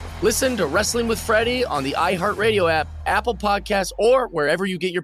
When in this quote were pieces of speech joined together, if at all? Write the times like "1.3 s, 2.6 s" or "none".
none